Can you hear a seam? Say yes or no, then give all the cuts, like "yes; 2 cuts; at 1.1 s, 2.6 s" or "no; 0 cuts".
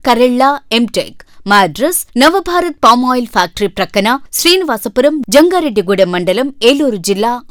no; 0 cuts